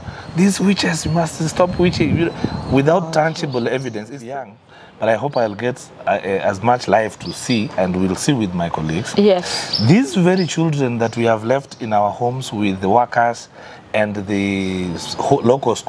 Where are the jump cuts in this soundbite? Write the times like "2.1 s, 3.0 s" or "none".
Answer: 4.3 s